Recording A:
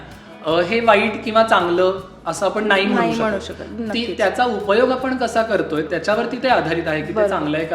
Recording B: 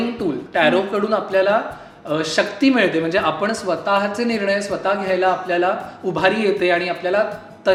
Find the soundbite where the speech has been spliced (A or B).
A